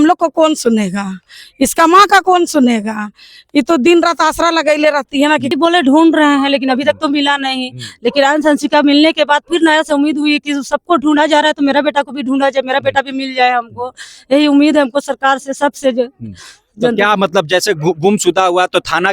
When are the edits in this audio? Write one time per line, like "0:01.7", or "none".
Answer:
0:05.5